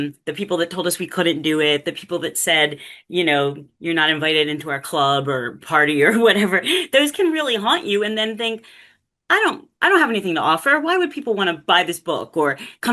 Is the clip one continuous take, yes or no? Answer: yes